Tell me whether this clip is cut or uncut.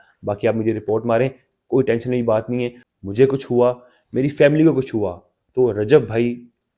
cut